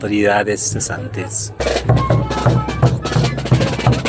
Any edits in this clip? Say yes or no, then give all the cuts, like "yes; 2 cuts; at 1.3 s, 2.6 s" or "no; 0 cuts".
yes; 1 cut; at 1.5 s